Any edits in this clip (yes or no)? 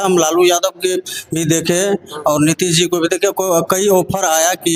no